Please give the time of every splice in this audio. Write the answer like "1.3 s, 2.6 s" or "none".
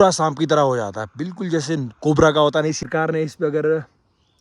2.8 s

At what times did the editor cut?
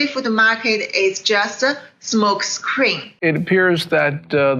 3.1 s

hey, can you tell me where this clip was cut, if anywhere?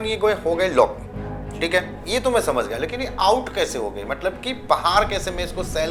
none

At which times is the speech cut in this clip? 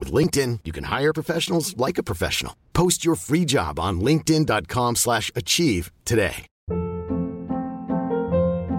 6.5 s

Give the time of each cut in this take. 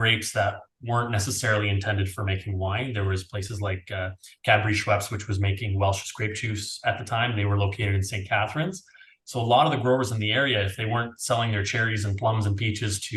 none

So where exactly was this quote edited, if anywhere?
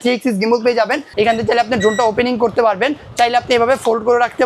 1.0 s

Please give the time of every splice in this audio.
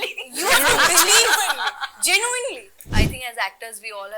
2.8 s

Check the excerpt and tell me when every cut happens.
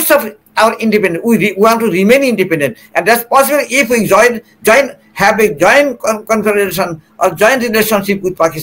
none

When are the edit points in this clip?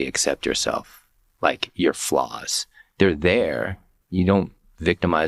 none

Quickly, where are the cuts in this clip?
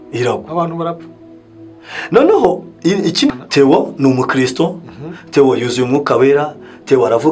3.3 s

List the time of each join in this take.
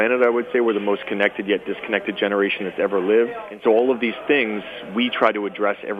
3.6 s

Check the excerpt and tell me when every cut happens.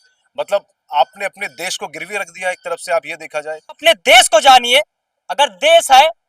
3.8 s

